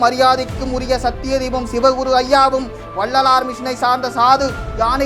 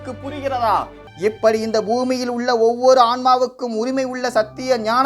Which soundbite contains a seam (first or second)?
second